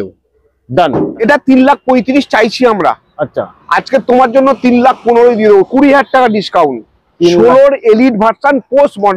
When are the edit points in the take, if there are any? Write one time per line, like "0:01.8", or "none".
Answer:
0:01.2